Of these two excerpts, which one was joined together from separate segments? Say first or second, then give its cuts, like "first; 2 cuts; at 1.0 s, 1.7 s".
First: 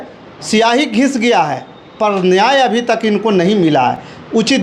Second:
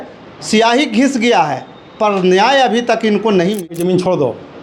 second; 1 cut; at 3.7 s